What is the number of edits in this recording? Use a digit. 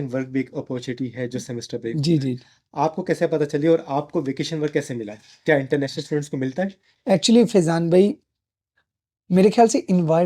0